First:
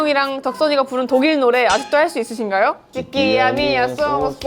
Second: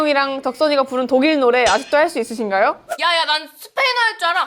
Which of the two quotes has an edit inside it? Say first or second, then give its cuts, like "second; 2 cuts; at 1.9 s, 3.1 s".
first; 1 cut; at 2.9 s